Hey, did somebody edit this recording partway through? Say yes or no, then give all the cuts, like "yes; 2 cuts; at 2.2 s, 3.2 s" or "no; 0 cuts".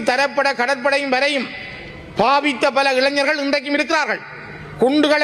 no; 0 cuts